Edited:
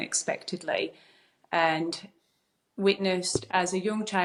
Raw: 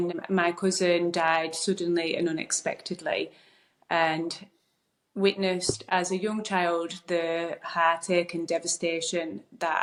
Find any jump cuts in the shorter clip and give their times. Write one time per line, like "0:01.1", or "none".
none